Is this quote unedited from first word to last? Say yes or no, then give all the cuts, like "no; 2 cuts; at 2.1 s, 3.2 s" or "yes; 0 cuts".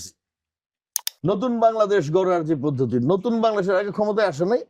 no; 1 cut; at 1.0 s